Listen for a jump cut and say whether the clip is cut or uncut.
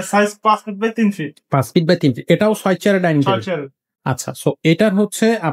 uncut